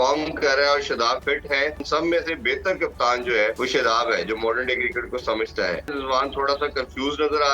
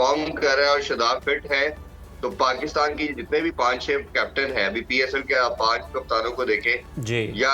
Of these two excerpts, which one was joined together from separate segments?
first; 3 cuts; at 1.8 s, 3.6 s, 6.0 s

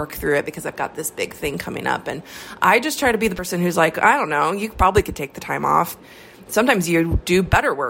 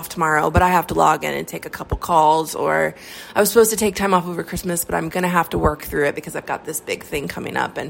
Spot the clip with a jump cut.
first; 1 cut; at 6.0 s

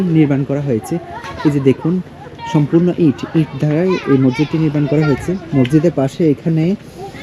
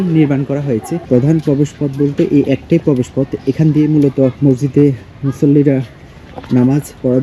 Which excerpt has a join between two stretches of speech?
second; 2 cuts; at 1.0 s, 4.4 s

